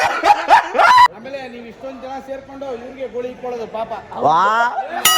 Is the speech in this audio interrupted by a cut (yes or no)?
yes